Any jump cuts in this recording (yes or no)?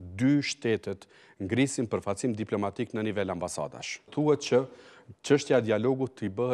yes